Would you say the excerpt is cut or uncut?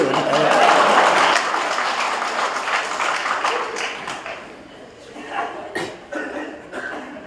uncut